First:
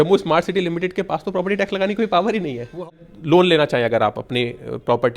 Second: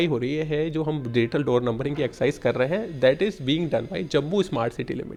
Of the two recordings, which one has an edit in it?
first; 1 cut; at 2.9 s

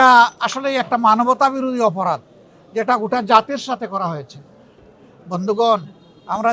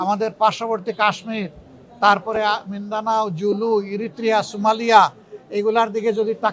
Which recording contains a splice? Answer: first; 1 cut; at 4.7 s

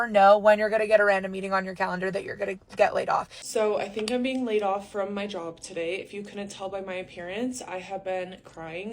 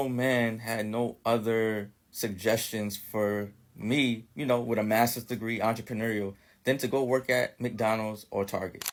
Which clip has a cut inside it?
first; 1 cut; at 3.4 s

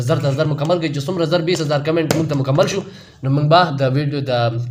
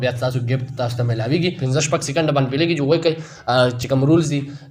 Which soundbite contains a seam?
second; 1 cut; at 1.6 s

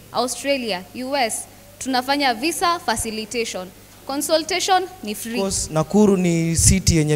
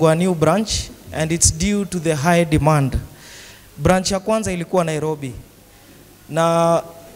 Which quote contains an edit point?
first; 1 cut; at 5.6 s

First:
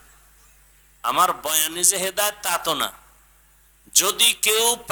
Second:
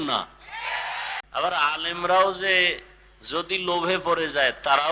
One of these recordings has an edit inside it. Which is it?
second; 1 cut; at 1.1 s

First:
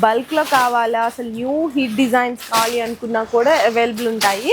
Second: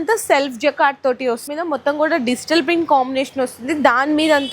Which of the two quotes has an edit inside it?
second; 1 cut; at 1.5 s

